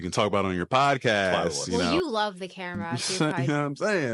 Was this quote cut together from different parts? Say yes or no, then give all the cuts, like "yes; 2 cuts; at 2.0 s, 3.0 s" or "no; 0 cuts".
yes; 2 cuts; at 1.5 s, 3.0 s